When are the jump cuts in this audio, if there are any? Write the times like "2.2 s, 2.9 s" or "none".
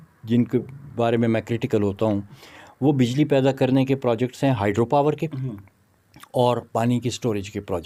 none